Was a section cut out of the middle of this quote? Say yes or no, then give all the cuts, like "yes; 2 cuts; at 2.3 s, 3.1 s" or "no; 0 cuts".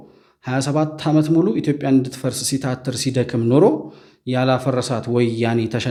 no; 0 cuts